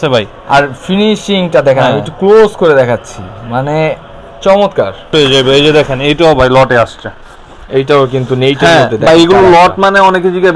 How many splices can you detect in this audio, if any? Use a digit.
1